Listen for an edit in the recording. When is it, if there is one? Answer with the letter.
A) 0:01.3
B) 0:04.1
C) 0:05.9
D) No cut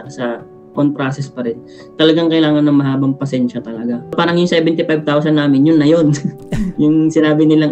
B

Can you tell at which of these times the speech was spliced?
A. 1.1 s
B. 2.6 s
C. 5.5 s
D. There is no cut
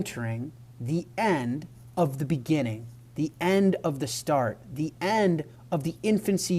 C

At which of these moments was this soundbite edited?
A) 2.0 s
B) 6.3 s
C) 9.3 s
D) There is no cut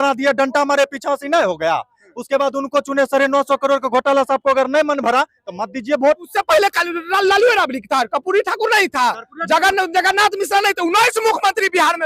B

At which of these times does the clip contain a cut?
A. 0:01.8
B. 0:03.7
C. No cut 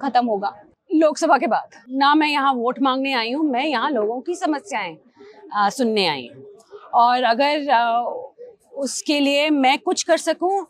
A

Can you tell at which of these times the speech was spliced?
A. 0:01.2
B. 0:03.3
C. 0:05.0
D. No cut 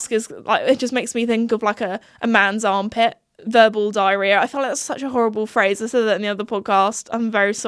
B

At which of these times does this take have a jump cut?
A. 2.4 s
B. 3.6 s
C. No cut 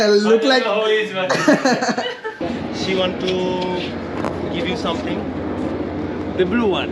A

